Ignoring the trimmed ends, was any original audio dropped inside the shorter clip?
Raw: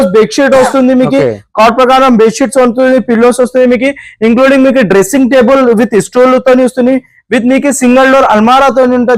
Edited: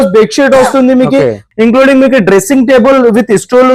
yes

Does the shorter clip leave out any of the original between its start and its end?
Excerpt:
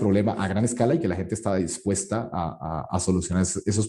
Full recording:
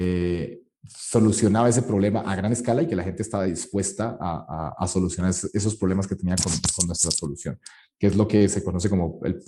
no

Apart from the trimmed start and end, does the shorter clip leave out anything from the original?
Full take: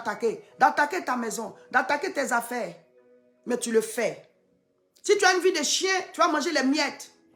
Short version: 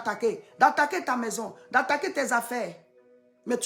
no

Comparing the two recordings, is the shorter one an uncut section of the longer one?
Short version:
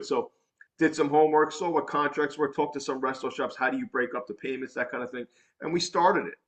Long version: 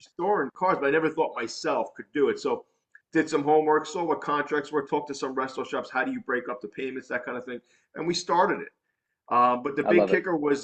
yes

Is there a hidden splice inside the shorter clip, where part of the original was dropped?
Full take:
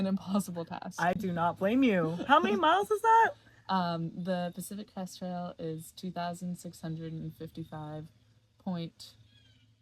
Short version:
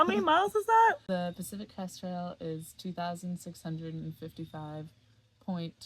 yes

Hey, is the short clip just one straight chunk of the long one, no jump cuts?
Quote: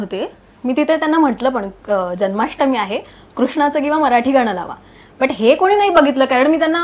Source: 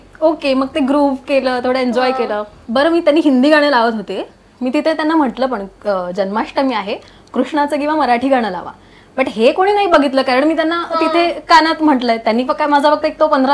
yes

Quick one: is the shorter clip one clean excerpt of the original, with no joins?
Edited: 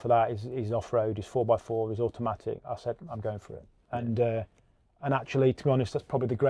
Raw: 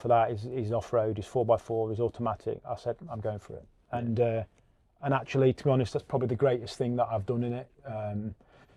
yes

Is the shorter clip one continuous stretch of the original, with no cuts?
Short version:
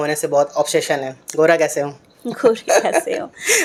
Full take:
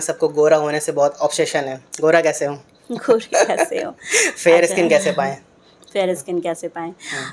yes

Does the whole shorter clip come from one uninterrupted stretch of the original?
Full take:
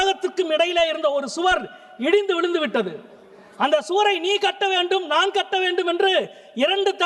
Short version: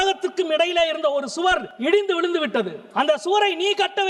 no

